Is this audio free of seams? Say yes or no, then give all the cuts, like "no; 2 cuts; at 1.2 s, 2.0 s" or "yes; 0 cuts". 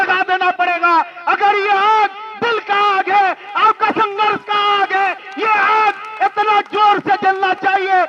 yes; 0 cuts